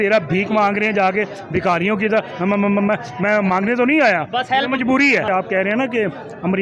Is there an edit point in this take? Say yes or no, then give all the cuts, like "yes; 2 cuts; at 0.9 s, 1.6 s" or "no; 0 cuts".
yes; 1 cut; at 5.3 s